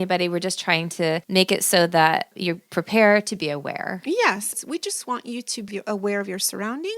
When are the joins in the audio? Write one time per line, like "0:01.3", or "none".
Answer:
0:04.5
0:05.7

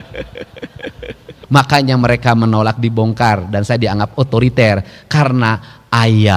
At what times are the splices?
0:01.3

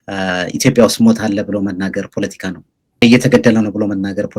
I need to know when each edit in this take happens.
0:03.0

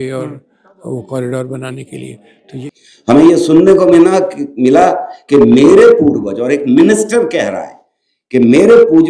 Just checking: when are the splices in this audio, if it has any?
0:02.3

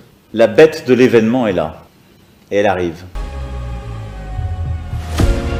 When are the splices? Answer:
none

